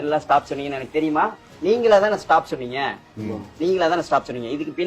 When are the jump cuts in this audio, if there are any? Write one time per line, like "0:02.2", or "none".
0:01.4

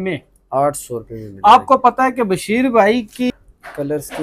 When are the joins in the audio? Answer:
0:03.3

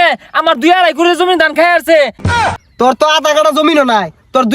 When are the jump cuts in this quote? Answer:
0:02.2

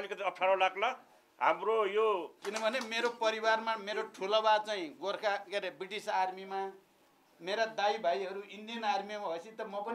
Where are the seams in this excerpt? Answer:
0:02.4

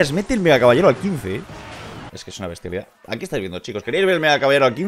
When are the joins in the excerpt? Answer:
0:02.2

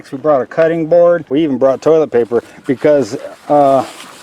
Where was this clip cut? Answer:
0:01.3

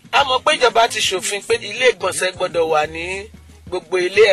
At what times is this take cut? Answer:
0:01.6

